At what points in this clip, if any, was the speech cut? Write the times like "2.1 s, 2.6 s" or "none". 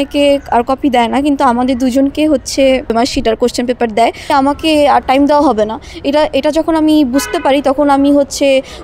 2.9 s, 4.3 s